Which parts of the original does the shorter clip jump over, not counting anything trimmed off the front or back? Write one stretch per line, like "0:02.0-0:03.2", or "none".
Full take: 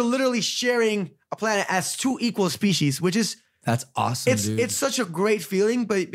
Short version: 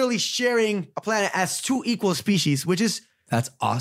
0:01.1-0:01.3